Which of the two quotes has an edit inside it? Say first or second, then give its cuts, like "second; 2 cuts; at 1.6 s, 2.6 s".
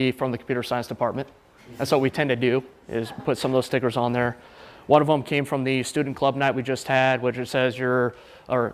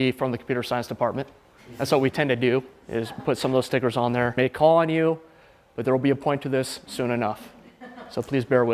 first; 1 cut; at 4.3 s